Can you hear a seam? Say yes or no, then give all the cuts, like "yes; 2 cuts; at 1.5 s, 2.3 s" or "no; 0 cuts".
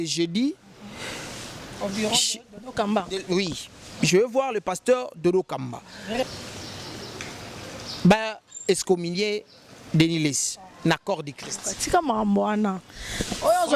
yes; 1 cut; at 6.2 s